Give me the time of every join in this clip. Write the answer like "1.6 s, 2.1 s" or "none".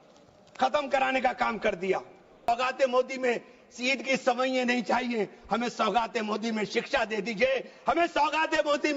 2.5 s